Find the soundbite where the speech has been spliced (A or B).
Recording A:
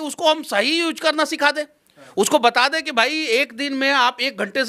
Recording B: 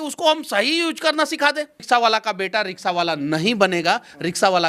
B